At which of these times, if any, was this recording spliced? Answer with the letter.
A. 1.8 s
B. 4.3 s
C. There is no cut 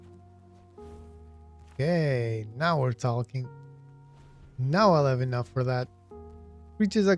A